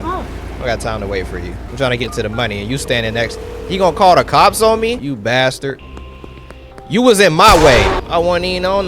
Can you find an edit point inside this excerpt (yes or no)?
yes